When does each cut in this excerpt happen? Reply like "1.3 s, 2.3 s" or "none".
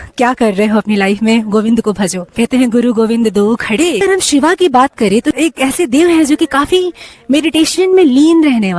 2.2 s, 4.0 s, 5.4 s